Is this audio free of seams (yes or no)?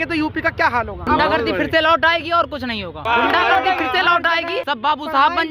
no